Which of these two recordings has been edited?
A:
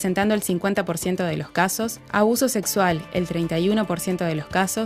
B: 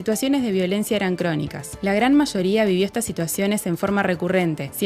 A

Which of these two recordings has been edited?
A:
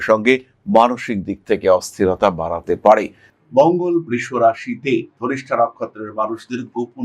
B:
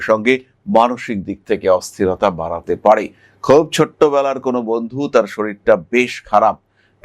A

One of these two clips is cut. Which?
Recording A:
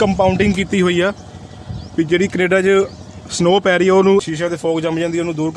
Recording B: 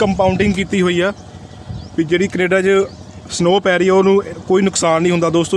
A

